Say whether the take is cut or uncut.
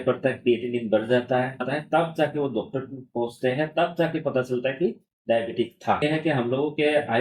cut